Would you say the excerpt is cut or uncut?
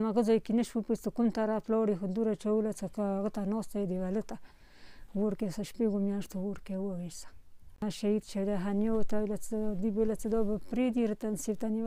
cut